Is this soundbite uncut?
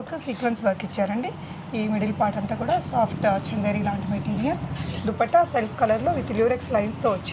yes; 0 cuts

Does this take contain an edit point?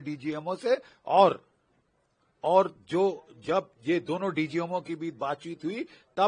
no; 0 cuts

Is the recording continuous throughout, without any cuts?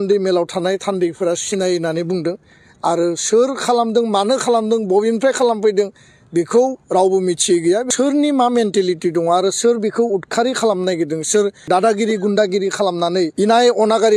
no; 3 cuts; at 7.9 s, 11.6 s, 13.3 s

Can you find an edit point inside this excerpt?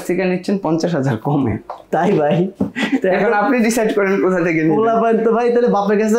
no; 0 cuts

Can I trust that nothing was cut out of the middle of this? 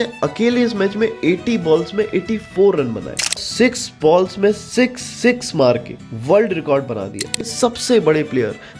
no; 2 cuts; at 3.3 s, 7.3 s

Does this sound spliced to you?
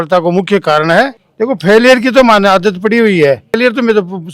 yes; 2 cuts; at 1.1 s, 3.6 s

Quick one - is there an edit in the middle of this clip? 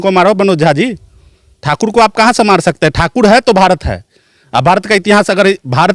no; 0 cuts

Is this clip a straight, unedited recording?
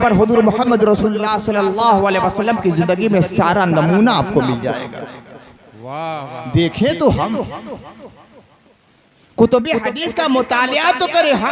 yes; 0 cuts

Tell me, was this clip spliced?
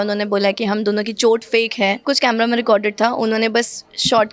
yes; 1 cut; at 2.0 s

